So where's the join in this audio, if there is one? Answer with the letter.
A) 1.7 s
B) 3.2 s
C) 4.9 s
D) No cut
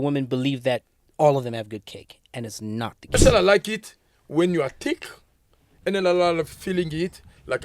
B